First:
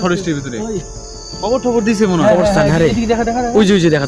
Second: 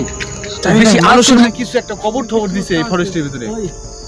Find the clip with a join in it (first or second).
second